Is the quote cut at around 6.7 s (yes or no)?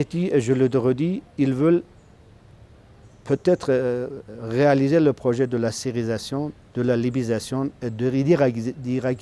no